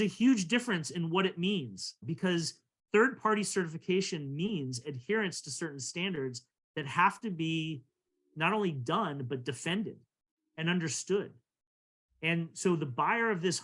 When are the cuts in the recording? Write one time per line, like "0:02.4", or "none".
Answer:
0:02.1